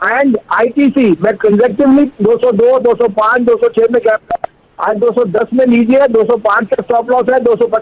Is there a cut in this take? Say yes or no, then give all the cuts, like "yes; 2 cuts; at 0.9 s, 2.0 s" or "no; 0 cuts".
no; 0 cuts